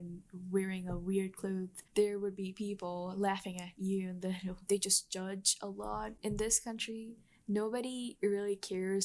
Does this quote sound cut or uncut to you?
cut